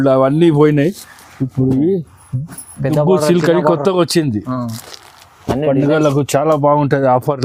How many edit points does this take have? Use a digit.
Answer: 0